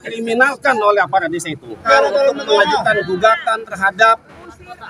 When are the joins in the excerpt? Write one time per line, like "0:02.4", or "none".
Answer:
0:01.8